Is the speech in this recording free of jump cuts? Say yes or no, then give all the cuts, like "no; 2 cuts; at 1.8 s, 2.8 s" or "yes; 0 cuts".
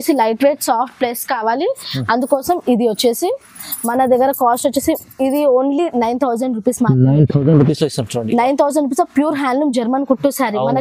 yes; 0 cuts